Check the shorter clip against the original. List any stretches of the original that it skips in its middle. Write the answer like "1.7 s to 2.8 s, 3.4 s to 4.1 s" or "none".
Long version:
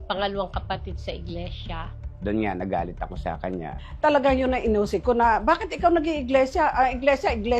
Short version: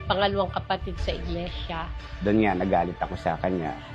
none

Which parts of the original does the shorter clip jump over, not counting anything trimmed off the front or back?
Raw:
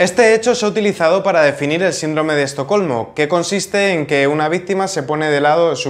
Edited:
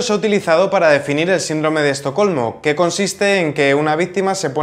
none

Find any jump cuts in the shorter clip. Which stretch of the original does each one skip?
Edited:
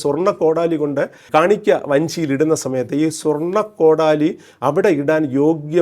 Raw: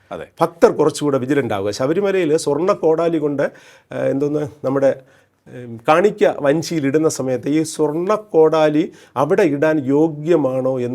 3.6 s to 5.7 s

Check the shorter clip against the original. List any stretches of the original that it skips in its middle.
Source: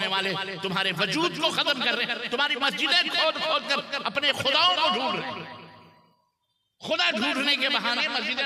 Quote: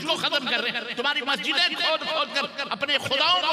none

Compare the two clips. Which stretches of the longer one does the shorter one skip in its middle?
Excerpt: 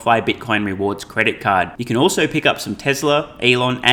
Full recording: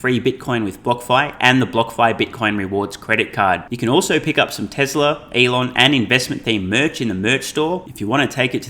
none

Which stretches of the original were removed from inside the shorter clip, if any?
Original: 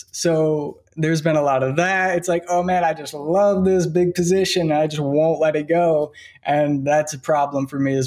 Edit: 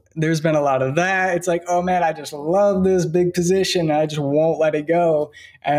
none

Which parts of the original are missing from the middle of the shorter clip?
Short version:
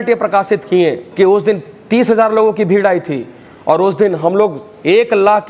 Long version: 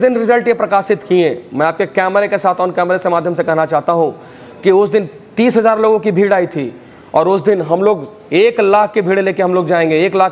1.4 s to 4.5 s

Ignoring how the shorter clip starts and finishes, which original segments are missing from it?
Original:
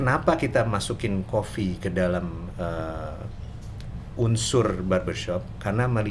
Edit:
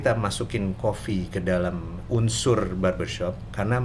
2.4 s to 4.0 s

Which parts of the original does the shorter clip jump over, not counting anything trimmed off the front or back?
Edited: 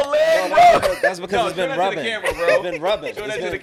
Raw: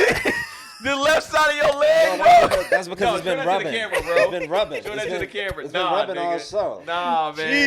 none

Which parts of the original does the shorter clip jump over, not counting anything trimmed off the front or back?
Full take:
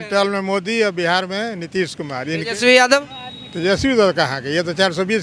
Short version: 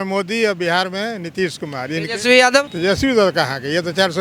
3.1 s to 3.5 s

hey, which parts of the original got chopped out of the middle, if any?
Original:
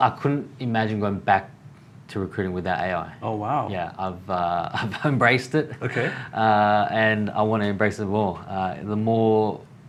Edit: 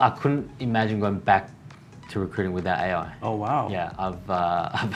none

